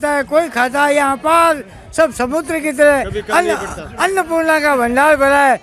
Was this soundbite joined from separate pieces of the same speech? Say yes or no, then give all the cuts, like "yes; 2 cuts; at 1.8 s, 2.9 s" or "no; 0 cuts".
no; 0 cuts